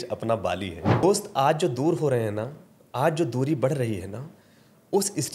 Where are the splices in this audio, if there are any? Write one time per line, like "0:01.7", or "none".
0:01.0